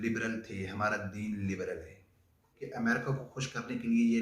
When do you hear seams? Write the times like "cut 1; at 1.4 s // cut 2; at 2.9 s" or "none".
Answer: cut 1; at 2.6 s